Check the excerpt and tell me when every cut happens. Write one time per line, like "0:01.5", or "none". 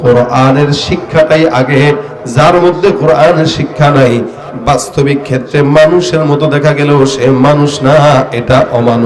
none